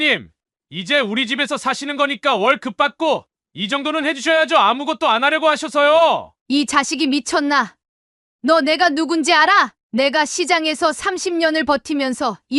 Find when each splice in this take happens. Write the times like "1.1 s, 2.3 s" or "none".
6.3 s, 9.8 s